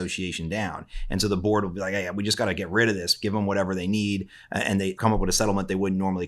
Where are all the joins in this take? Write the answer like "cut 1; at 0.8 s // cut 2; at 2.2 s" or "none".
cut 1; at 4.9 s